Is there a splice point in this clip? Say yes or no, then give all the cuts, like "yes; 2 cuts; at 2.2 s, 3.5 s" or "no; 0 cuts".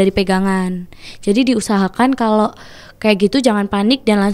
no; 0 cuts